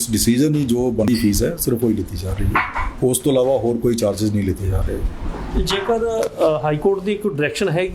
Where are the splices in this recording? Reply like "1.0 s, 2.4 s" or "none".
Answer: 1.1 s